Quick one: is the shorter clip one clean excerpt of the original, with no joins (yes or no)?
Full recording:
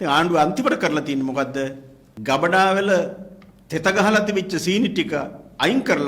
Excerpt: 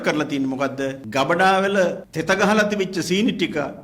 no